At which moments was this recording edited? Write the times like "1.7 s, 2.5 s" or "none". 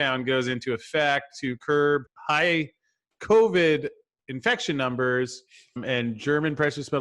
2.1 s, 5.8 s